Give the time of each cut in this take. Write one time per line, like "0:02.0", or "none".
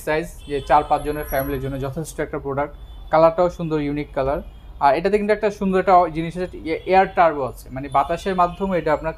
none